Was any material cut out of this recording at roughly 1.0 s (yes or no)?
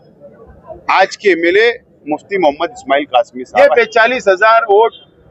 no